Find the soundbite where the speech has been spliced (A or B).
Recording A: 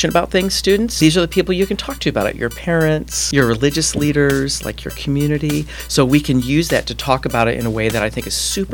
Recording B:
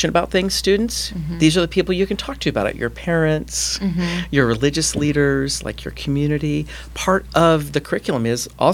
A